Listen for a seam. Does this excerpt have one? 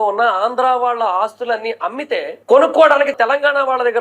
yes; 1 cut; at 3.1 s

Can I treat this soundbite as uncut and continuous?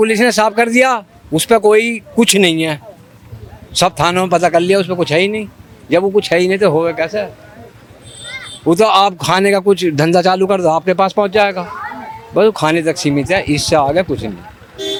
yes; 0 cuts

